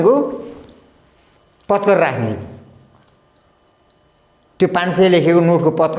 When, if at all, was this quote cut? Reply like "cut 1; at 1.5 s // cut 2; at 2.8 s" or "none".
none